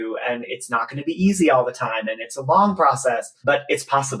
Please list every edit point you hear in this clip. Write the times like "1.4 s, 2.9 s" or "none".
3.3 s